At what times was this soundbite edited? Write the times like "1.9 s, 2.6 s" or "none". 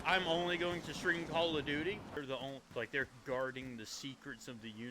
2.2 s